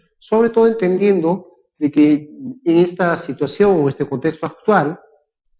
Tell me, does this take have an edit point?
yes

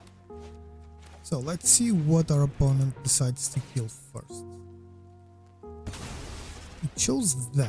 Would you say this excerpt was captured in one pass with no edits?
no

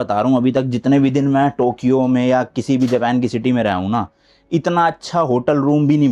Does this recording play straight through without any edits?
yes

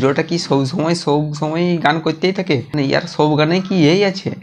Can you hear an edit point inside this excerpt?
no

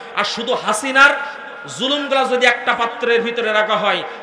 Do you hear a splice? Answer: no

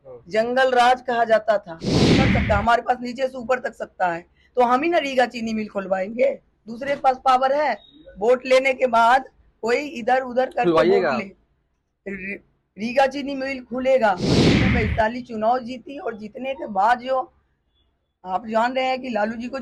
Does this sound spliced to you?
yes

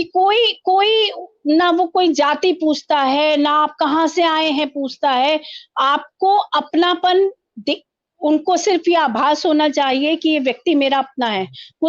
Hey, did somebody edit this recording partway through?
no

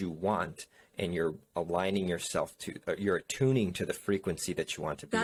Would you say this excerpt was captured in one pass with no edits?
yes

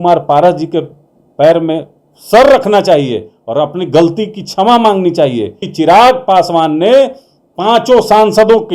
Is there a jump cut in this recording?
yes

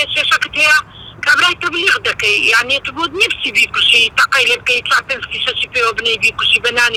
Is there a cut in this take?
no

